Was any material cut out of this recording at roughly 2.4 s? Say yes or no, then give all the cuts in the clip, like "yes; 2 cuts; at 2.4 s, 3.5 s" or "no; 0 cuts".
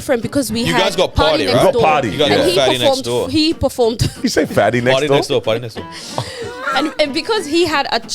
no; 1 cut; at 4.2 s